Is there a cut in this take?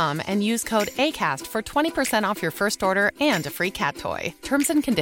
no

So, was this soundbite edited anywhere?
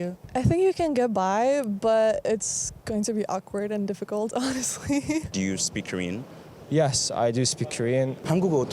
yes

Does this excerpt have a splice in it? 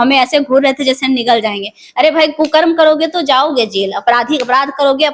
no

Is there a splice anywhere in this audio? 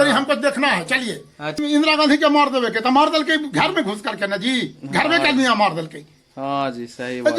yes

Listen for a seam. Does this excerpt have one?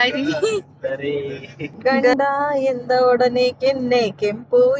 yes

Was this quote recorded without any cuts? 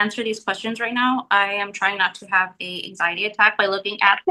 yes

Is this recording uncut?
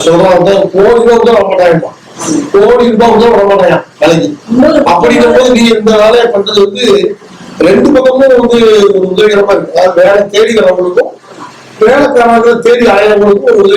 yes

